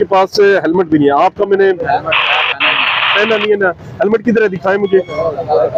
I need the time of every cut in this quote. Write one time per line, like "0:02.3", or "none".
none